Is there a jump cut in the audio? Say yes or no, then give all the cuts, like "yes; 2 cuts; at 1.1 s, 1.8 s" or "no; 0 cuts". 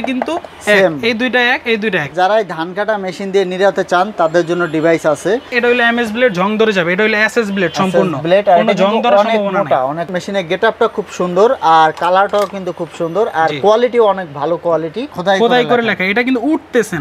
yes; 4 cuts; at 2.1 s, 5.5 s, 10.1 s, 15.2 s